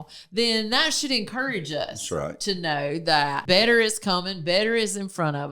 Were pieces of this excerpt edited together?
yes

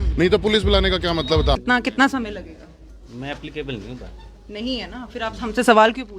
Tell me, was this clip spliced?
yes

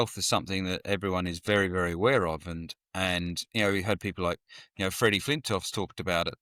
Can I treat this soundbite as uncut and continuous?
yes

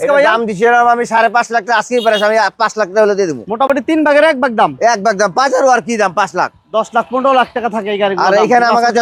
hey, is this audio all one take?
yes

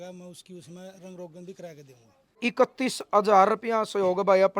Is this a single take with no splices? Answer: no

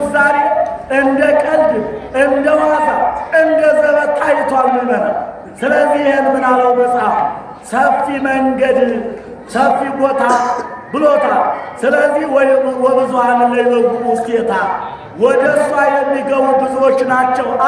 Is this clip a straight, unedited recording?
yes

